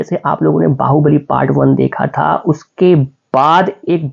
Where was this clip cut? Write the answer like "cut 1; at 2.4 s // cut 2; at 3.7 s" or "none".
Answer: none